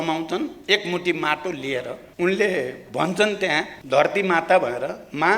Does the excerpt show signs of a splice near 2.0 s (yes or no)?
yes